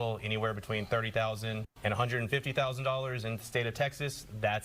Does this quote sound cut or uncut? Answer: cut